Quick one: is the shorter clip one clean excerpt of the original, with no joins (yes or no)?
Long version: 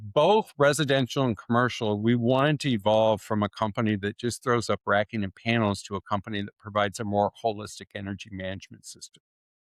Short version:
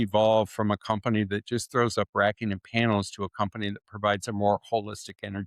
yes